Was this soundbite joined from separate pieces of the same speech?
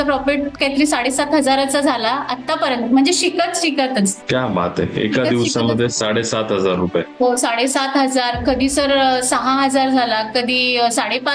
yes; 1 cut; at 4.2 s

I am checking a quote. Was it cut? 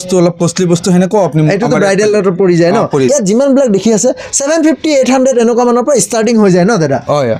no; 0 cuts

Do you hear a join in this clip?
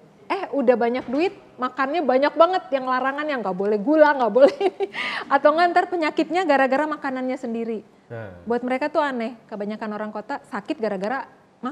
no; 0 cuts

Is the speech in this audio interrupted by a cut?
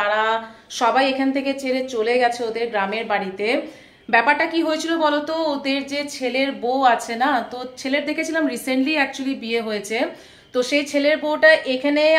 no; 0 cuts

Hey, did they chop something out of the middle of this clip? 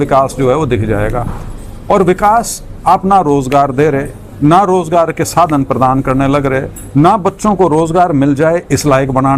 no; 0 cuts

